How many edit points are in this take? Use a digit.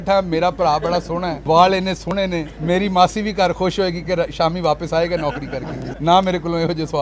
3